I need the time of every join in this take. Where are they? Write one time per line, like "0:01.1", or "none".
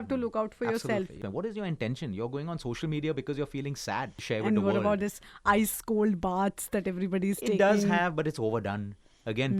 0:01.2
0:04.2